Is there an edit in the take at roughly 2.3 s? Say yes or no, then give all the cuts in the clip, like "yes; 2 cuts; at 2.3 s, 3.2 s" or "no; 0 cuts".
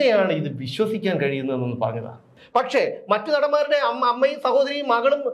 yes; 1 cut; at 2.3 s